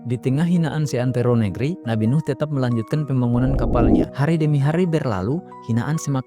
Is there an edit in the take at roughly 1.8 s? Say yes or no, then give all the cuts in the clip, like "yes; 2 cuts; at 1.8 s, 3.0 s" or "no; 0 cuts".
yes; 2 cuts; at 1.8 s, 4.1 s